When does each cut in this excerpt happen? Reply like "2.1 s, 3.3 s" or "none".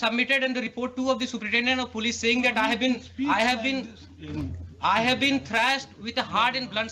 none